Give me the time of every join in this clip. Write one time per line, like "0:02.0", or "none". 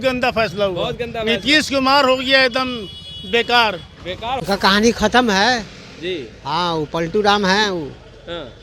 0:04.4